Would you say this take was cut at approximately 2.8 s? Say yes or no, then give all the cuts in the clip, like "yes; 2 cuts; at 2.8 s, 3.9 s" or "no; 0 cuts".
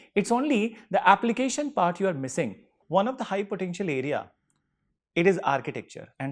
yes; 1 cut; at 2.8 s